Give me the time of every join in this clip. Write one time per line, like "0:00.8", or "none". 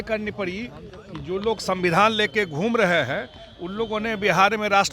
none

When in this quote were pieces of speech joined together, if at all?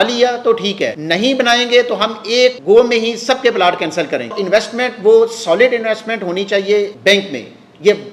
0:01.0
0:02.6
0:04.4
0:06.9

